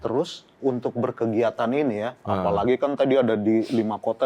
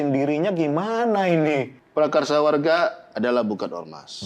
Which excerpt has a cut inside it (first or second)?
second